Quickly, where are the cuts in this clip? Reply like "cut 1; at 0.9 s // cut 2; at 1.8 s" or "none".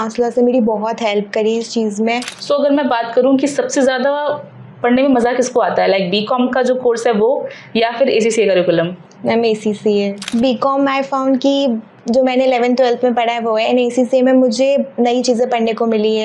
cut 1; at 2.3 s // cut 2; at 10.3 s